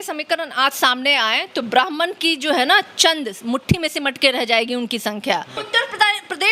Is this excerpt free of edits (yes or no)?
no